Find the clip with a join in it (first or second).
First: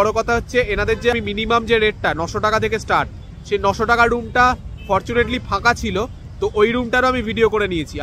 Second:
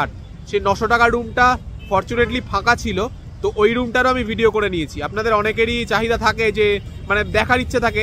first